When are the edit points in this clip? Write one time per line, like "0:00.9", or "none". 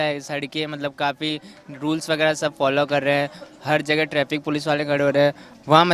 none